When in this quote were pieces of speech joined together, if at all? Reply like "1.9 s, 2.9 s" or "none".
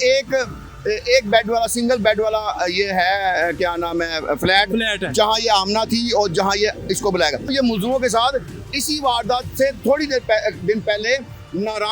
7.5 s